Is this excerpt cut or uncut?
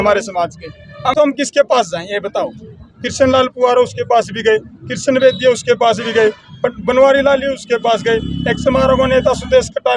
cut